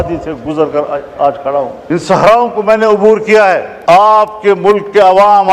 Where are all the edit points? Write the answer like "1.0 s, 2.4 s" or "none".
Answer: 1.8 s, 3.7 s